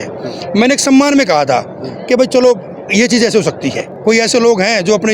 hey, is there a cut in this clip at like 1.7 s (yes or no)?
no